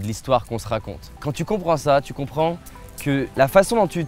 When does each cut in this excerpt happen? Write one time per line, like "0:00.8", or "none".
0:01.2
0:03.3